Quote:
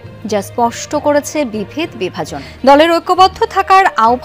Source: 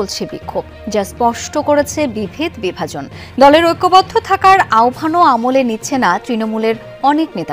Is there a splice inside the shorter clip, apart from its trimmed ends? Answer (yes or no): yes